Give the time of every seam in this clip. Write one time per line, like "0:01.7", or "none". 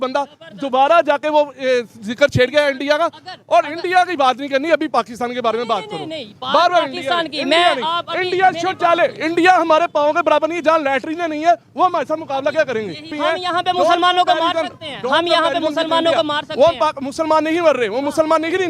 0:13.2

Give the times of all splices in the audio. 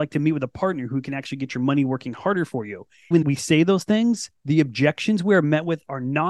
0:03.1
0:04.3

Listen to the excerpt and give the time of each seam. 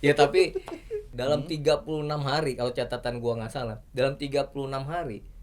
0:01.1

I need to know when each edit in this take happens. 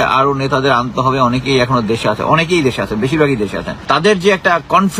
0:03.7

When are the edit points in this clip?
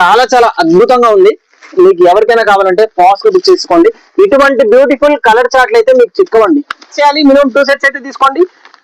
0:06.9

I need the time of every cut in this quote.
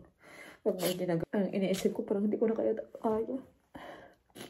0:01.2

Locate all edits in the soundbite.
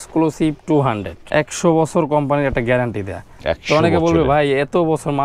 0:01.1

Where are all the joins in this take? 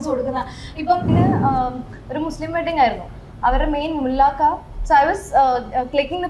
0:01.1

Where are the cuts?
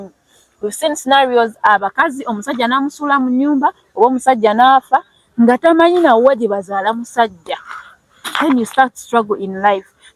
none

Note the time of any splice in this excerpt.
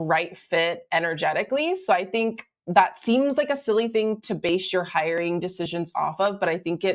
none

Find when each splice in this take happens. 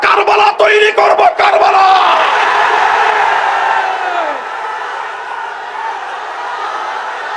none

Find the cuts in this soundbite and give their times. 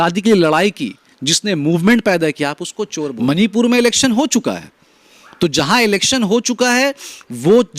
0:03.0

